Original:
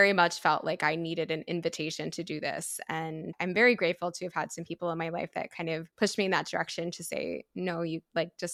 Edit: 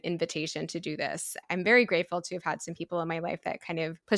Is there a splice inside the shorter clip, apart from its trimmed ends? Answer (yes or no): yes